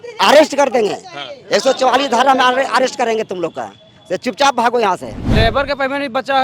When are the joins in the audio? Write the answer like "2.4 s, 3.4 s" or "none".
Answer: 5.2 s